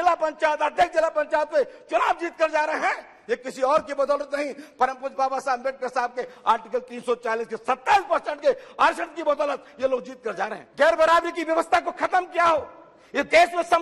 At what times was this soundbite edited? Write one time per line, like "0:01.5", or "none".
0:10.6